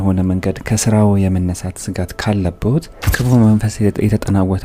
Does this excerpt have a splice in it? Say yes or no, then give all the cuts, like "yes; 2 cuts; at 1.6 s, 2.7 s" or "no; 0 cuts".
yes; 1 cut; at 3.0 s